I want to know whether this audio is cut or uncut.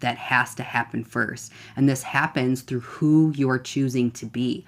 uncut